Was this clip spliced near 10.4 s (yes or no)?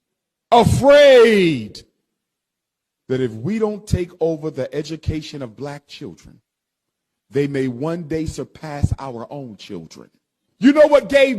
yes